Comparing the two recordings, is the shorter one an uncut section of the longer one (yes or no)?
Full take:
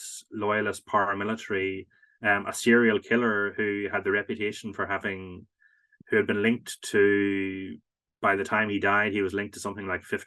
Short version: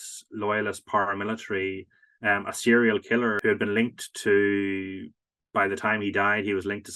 no